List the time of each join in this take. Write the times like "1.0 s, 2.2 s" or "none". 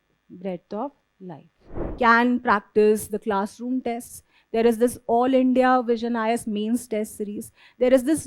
1.8 s